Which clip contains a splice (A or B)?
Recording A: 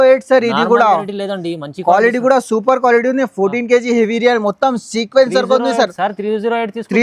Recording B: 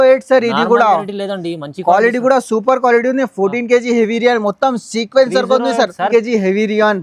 B